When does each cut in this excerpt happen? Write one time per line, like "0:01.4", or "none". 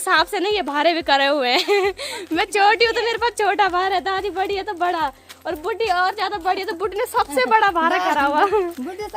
none